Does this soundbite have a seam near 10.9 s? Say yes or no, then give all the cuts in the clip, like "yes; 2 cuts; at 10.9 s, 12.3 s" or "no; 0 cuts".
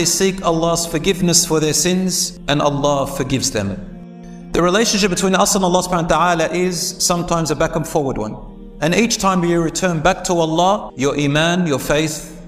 yes; 3 cuts; at 2.3 s, 4.0 s, 10.9 s